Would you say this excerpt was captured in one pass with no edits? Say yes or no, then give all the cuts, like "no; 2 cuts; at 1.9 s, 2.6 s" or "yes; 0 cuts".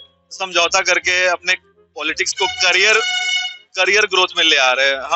yes; 0 cuts